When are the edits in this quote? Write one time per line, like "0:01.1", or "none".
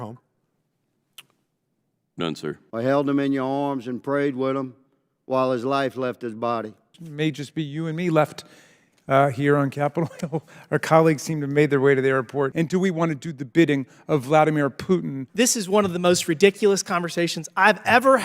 0:02.6
0:07.1
0:12.5
0:15.2